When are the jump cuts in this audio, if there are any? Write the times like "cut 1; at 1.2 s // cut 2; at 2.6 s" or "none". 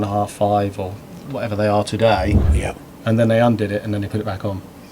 cut 1; at 2.4 s

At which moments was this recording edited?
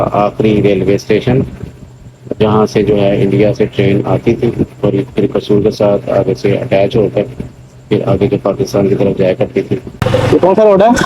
cut 1; at 9.9 s

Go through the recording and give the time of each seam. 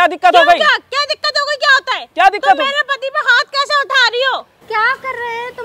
cut 1; at 4.5 s

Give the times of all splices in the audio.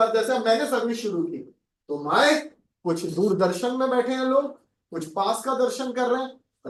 none

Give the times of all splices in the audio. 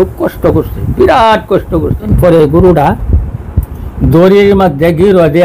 cut 1; at 2.1 s

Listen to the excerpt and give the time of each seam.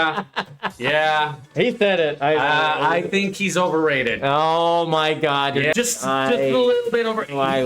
cut 1; at 5.7 s

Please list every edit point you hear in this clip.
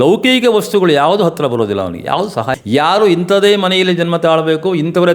cut 1; at 2.5 s

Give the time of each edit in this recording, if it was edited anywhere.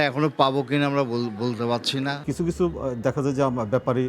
cut 1; at 2.2 s

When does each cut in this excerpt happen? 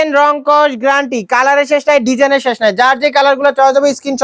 none

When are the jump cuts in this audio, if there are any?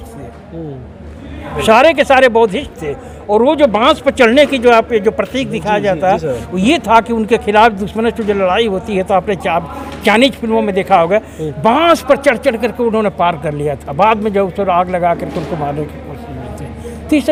none

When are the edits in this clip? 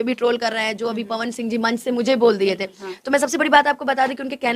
none

